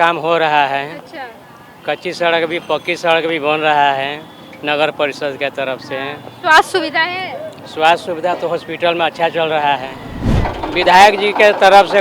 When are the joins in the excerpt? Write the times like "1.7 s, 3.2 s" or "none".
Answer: 10.4 s